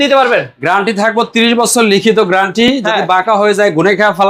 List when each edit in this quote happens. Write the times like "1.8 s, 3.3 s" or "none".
none